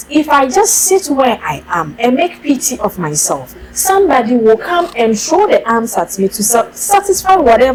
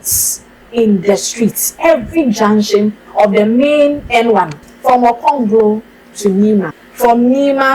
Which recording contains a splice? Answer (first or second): second